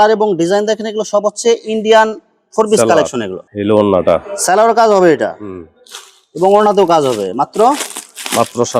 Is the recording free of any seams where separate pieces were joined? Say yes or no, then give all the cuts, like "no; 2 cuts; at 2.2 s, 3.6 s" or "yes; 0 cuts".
yes; 0 cuts